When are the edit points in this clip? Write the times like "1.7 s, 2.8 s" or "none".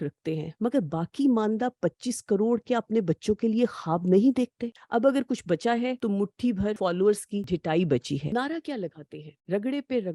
4.6 s, 6.5 s, 7.4 s, 8.3 s